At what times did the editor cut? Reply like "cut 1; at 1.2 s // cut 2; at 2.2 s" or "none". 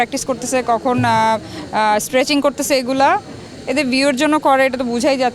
none